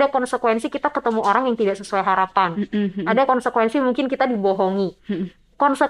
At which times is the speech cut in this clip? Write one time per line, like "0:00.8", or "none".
none